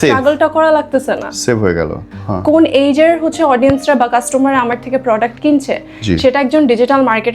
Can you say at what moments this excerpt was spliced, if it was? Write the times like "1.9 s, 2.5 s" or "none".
2.1 s